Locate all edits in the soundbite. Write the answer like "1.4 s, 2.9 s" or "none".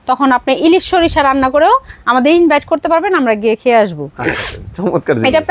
none